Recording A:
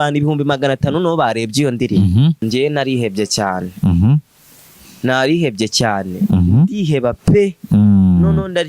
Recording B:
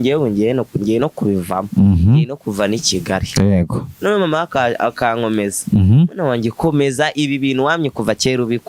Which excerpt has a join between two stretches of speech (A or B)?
A